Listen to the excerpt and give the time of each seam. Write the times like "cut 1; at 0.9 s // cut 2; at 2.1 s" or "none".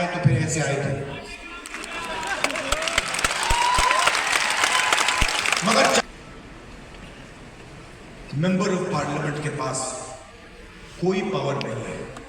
cut 1; at 6.0 s